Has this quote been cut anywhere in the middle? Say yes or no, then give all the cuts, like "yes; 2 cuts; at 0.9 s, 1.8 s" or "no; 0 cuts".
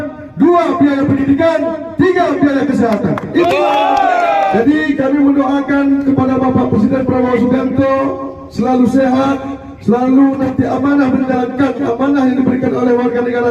yes; 1 cut; at 4.5 s